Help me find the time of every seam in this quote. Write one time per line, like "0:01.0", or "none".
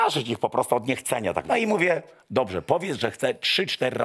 0:01.4